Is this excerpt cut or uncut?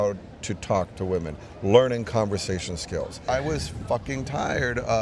cut